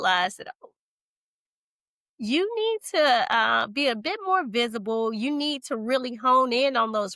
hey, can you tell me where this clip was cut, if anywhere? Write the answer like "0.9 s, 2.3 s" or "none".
none